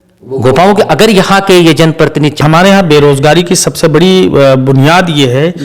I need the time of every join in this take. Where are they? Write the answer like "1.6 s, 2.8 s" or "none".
2.4 s